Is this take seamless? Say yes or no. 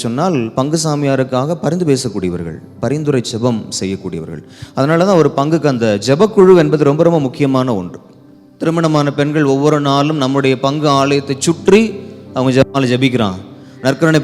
no